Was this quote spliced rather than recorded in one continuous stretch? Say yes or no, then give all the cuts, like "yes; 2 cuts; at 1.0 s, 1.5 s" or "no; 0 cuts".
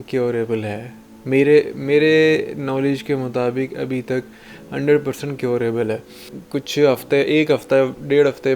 yes; 1 cut; at 6.4 s